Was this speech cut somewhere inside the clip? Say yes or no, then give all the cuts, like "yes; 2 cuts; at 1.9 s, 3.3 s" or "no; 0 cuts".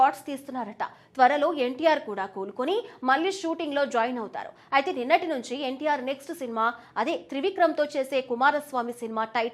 no; 0 cuts